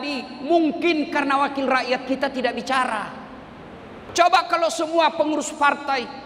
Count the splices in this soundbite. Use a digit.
1